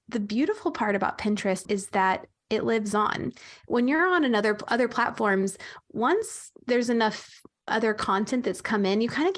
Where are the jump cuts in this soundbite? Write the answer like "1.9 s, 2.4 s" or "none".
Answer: 1.6 s, 7.7 s